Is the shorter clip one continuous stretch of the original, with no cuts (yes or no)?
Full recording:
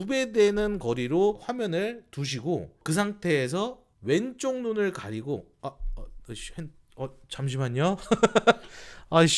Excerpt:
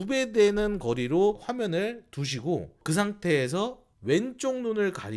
yes